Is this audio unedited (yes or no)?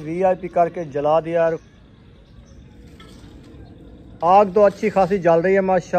no